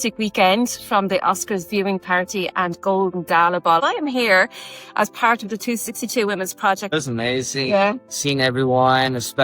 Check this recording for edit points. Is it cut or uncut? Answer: cut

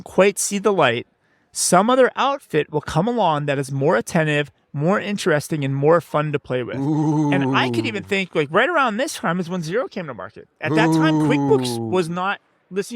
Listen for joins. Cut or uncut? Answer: uncut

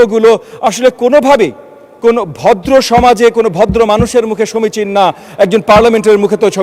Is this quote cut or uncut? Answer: uncut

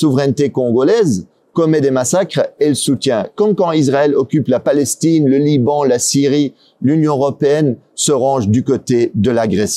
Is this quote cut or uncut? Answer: uncut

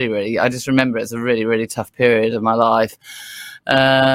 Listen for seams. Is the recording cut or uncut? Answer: uncut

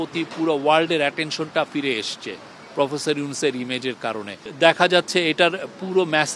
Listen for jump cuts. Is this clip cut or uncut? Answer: uncut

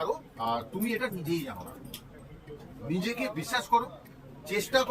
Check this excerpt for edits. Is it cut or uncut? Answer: uncut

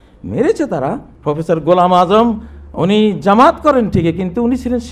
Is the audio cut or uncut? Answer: cut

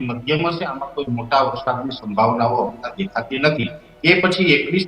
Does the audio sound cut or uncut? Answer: uncut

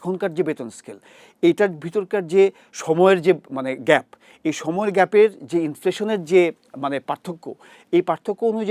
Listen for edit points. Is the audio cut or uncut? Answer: uncut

